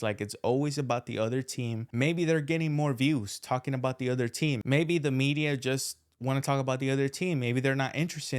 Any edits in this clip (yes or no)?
no